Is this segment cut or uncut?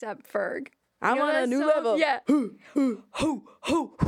cut